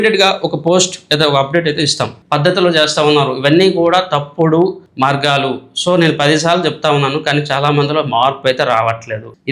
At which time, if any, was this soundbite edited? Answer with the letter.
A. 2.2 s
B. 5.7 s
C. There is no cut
A